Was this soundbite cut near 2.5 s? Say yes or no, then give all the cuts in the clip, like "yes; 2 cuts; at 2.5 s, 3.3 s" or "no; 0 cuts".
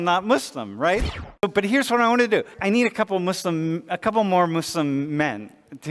yes; 2 cuts; at 1.2 s, 2.5 s